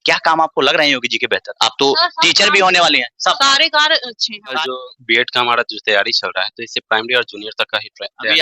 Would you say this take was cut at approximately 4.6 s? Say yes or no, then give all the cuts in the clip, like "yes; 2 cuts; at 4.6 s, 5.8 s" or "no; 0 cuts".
yes; 1 cut; at 4.6 s